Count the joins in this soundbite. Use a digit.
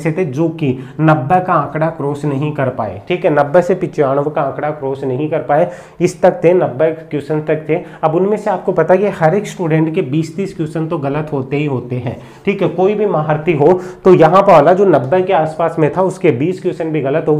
0